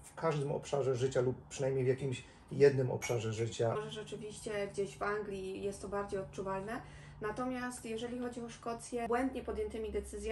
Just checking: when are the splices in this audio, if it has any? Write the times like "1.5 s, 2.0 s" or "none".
3.8 s, 9.1 s